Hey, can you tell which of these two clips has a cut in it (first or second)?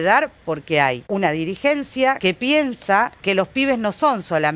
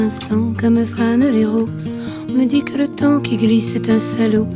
first